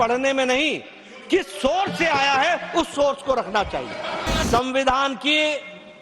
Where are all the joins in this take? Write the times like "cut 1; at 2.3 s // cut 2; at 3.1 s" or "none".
cut 1; at 4.5 s